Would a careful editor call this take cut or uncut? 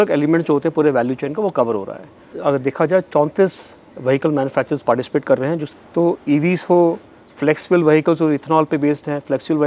cut